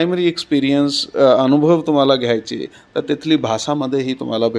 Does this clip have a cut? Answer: no; 0 cuts

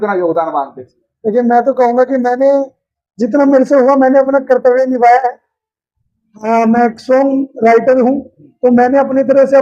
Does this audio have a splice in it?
no; 0 cuts

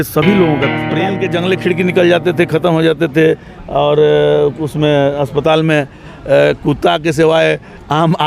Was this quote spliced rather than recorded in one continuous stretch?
yes; 1 cut; at 1.1 s

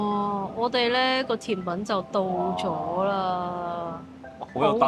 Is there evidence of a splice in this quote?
no; 0 cuts

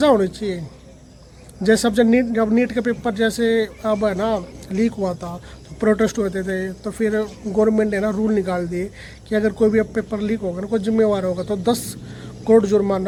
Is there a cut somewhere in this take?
no; 0 cuts

